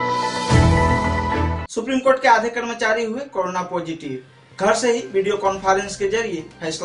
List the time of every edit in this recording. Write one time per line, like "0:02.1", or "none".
0:01.4